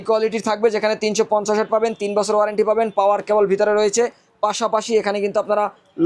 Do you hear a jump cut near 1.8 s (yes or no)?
no